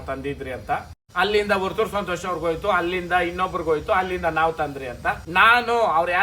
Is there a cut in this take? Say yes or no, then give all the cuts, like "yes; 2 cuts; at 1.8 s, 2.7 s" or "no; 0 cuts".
yes; 2 cuts; at 1.0 s, 5.2 s